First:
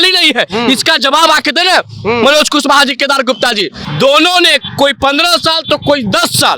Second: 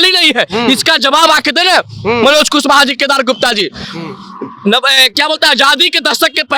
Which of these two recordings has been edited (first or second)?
first